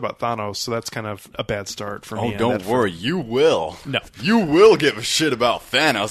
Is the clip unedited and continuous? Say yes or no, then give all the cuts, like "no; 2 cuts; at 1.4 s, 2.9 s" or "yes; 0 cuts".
no; 1 cut; at 1.3 s